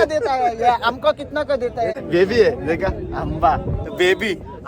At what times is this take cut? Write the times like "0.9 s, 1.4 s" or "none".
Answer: 1.9 s

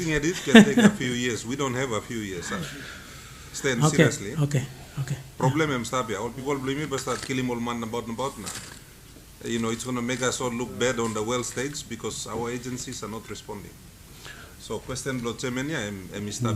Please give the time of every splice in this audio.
none

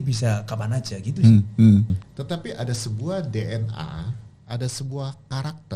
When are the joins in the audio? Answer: 2.0 s

